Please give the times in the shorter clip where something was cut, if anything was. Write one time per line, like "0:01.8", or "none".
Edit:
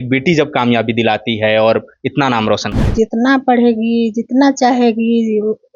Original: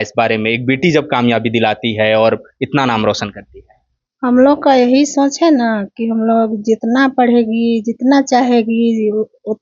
0:02.9